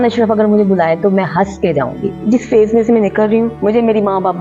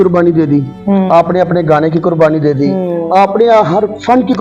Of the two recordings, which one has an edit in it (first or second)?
first